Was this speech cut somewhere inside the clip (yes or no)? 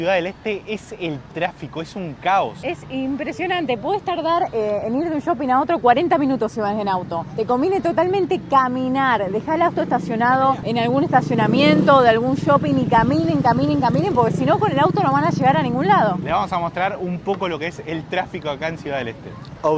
no